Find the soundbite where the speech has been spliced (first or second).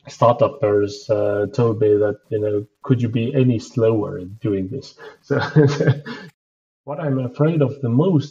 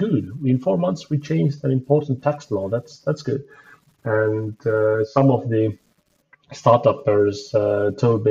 first